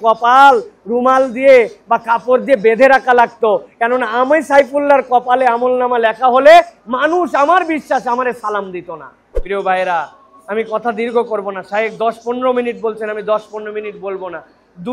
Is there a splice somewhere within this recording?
yes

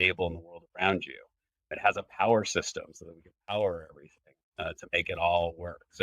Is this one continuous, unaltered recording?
no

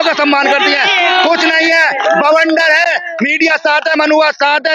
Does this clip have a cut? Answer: no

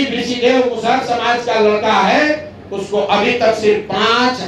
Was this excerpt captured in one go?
yes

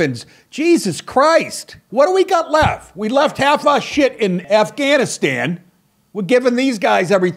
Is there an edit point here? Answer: yes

